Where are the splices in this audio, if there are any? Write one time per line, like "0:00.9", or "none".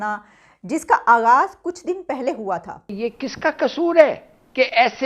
0:02.9